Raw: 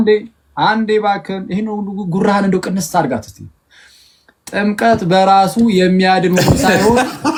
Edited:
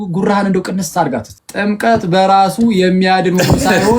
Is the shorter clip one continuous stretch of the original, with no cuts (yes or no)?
no